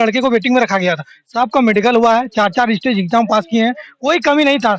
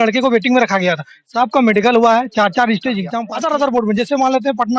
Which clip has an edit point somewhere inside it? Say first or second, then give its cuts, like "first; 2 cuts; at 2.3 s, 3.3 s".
second; 1 cut; at 3.1 s